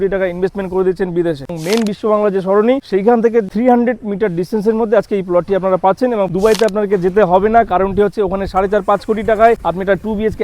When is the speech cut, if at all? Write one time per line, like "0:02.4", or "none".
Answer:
0:01.6
0:06.3